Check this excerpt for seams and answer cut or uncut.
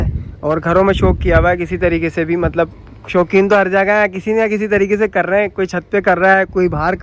uncut